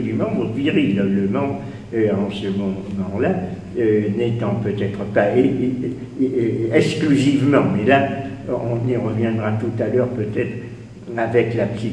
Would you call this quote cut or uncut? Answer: cut